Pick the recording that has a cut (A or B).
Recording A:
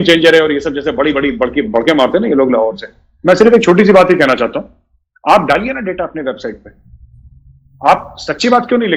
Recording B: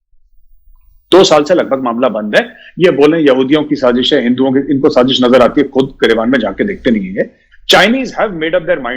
B